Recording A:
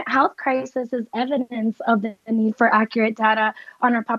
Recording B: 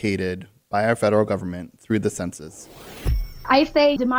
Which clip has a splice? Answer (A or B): B